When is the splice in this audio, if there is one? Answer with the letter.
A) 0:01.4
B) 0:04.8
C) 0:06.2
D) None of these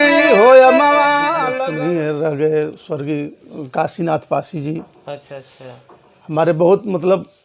A